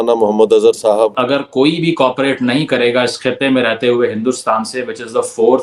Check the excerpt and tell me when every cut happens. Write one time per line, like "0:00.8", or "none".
0:01.2